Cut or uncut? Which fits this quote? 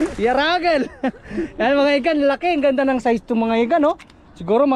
uncut